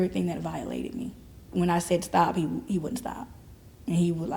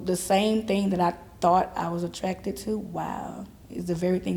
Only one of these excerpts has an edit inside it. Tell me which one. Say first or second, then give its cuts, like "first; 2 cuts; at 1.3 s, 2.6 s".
first; 1 cut; at 1.4 s